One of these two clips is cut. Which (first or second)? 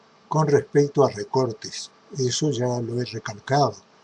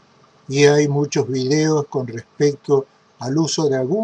second